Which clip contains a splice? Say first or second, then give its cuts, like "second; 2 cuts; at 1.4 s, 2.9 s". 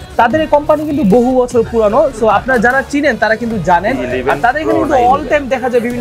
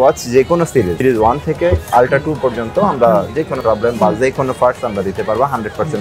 second; 2 cuts; at 1.0 s, 3.5 s